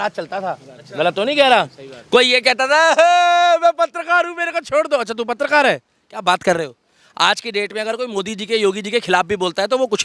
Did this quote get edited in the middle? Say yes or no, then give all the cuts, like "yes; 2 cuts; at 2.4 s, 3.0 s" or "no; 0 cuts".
no; 0 cuts